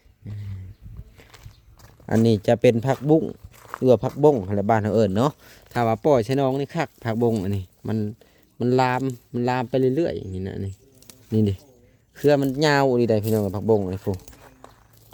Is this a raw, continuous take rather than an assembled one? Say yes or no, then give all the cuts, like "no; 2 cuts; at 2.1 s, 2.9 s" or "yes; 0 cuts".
yes; 0 cuts